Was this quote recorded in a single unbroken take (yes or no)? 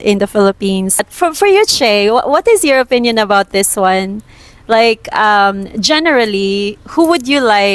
yes